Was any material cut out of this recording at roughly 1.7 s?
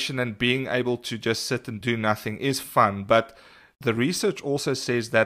yes; 1 cut; at 1.7 s

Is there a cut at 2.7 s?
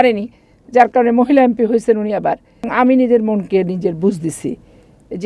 yes; 1 cut; at 2.7 s

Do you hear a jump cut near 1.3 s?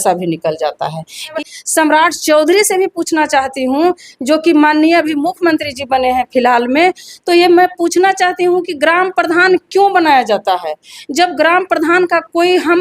yes; 1 cut; at 1.3 s

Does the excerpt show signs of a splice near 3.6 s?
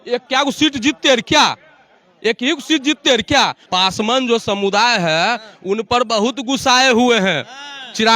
yes; 1 cut; at 3.6 s

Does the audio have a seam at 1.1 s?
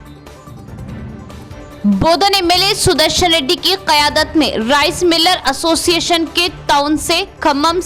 yes; 1 cut; at 1.1 s

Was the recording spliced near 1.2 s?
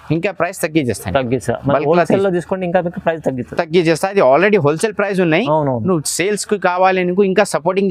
no; 0 cuts

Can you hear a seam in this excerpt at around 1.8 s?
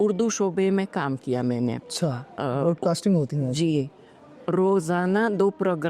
no; 0 cuts

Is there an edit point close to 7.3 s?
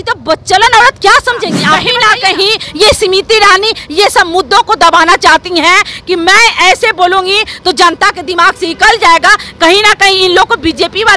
no; 1 cut; at 1.8 s

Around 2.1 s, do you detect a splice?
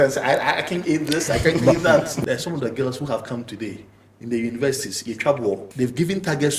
yes; 2 cuts; at 2.1 s, 5.7 s

